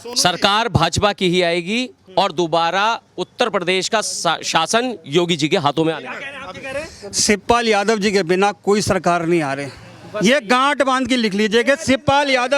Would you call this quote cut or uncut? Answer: uncut